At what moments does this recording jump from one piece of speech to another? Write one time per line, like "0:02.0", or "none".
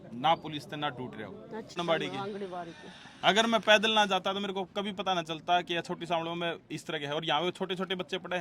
0:01.8

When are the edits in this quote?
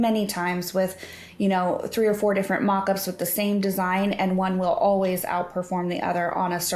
none

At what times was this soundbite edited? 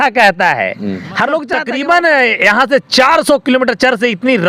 0:01.6

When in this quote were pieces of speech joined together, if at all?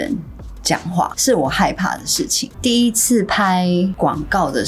0:01.2
0:02.5

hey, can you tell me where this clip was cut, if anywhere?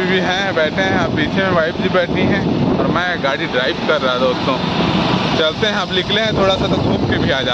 none

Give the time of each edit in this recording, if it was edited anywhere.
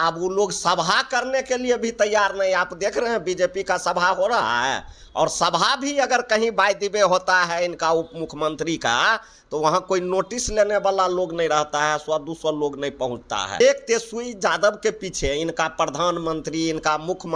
0:13.6

